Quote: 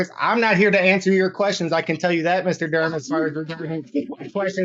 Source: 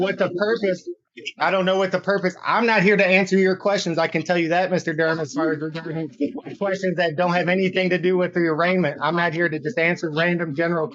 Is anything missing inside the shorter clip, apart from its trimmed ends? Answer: no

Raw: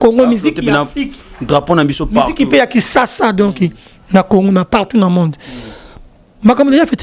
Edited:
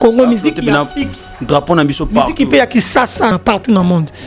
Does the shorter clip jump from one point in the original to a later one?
yes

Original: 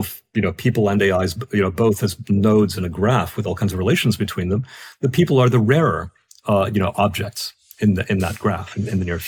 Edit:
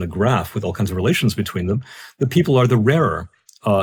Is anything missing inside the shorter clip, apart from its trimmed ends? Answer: no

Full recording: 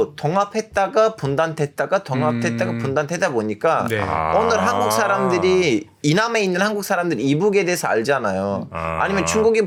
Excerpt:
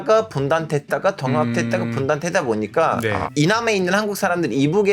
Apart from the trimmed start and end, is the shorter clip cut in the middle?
yes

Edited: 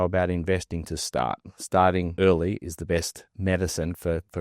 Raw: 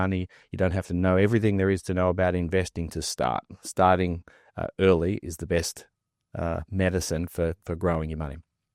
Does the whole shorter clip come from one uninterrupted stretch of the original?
no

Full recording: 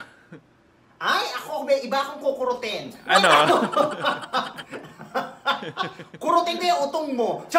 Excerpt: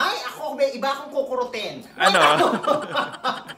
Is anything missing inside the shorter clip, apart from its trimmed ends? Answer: no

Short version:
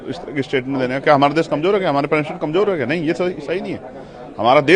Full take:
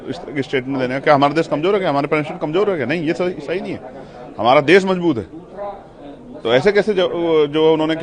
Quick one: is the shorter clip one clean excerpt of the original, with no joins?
yes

